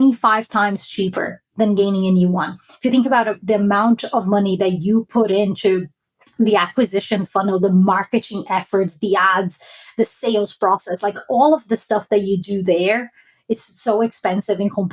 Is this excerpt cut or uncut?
uncut